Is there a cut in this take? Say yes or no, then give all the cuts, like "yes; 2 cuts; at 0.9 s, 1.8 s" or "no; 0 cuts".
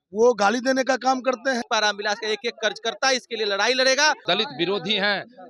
yes; 2 cuts; at 1.7 s, 4.2 s